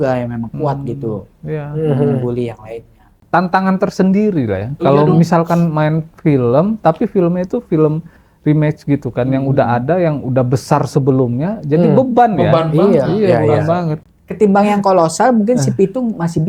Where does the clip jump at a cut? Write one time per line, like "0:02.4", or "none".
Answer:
0:03.2
0:14.1